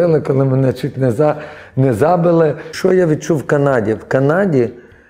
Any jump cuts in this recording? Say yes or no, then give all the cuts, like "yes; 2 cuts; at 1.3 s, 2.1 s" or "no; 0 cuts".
yes; 1 cut; at 2.7 s